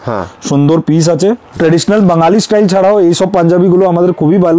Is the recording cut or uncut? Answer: cut